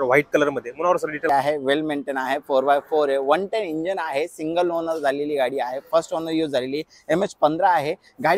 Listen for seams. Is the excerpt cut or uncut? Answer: cut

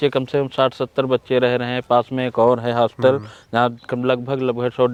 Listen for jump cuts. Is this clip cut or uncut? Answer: uncut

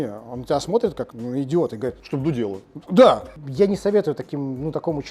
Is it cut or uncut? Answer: cut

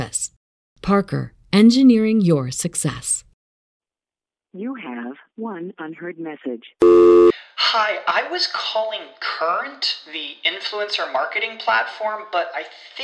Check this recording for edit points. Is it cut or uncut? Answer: cut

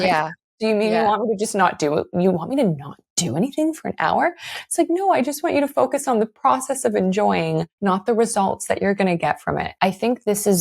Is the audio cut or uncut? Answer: cut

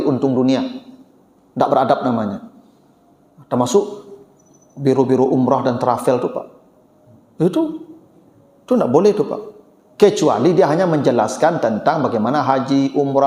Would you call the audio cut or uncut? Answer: uncut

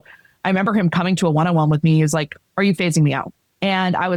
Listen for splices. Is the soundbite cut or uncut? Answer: uncut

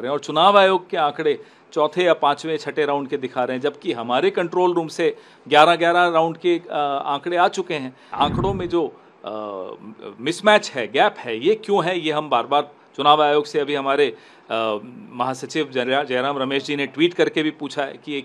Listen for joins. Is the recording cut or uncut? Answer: cut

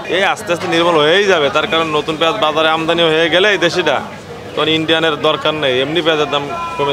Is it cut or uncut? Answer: uncut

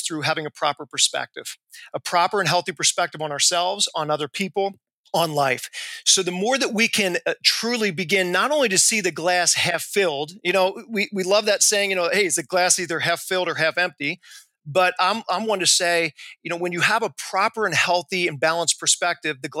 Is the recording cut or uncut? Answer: uncut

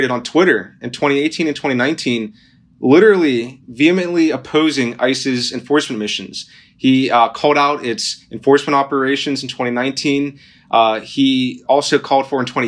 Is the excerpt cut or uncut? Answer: uncut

